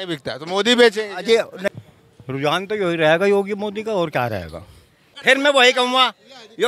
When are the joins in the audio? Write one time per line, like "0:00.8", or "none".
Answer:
0:01.6
0:05.1